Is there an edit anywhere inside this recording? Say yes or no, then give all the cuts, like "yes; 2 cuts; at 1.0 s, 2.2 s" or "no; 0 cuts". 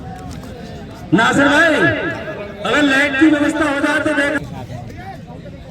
yes; 1 cut; at 4.4 s